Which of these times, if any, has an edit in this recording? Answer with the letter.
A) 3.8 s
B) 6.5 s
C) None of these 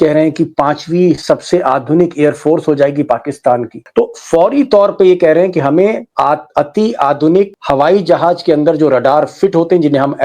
A